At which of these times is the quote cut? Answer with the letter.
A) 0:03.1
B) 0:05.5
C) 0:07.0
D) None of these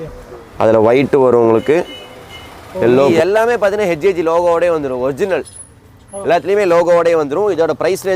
A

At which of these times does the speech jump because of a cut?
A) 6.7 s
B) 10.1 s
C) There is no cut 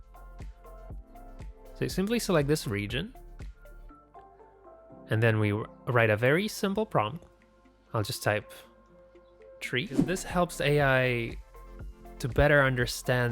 B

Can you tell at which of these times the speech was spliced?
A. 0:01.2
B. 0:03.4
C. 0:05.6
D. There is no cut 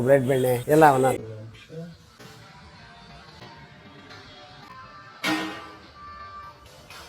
A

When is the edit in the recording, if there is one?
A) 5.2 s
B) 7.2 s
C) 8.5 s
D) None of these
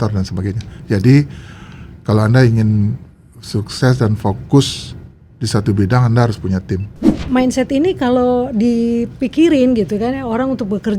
B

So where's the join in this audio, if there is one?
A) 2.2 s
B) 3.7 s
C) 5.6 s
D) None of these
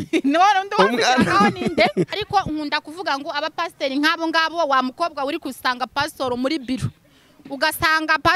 A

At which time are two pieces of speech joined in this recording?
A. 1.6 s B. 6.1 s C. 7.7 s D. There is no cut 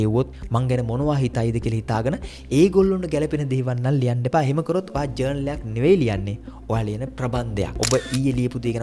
C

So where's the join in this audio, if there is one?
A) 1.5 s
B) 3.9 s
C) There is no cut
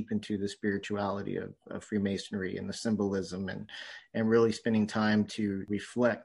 C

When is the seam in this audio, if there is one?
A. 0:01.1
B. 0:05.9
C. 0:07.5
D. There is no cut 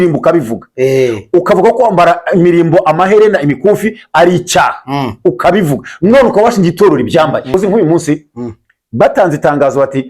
C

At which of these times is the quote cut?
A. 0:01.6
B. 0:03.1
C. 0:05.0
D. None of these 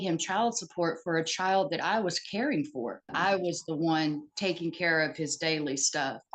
B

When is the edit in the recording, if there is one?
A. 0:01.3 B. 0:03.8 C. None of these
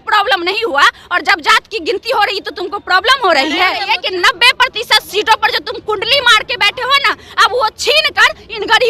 B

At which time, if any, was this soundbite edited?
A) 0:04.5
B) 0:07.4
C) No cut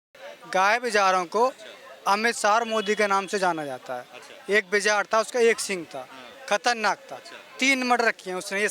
C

